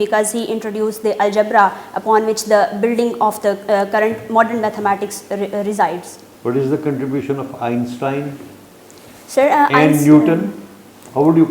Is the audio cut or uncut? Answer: uncut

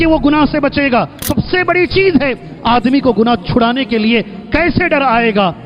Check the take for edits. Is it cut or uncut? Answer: cut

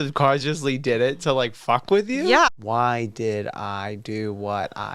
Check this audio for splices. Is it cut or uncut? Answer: cut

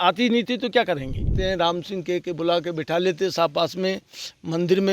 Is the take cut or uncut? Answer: cut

